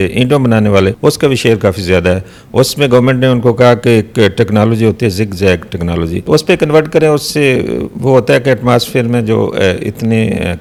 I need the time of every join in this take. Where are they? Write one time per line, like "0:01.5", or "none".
none